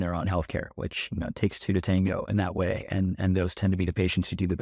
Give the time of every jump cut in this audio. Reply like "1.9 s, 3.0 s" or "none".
none